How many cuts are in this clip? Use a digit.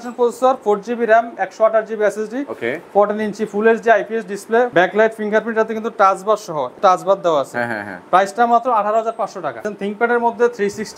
3